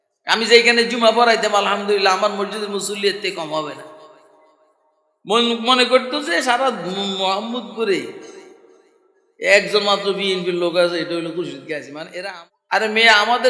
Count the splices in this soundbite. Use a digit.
1